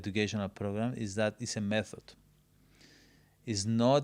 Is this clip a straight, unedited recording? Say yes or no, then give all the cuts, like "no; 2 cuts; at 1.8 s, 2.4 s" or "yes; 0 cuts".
yes; 0 cuts